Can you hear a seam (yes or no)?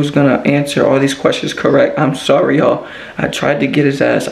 no